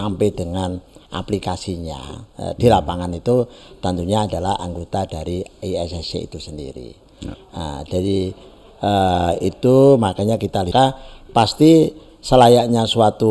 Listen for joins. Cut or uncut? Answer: cut